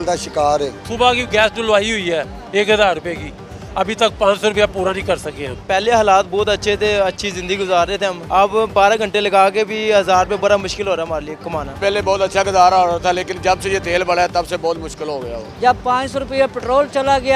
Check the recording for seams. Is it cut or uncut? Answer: cut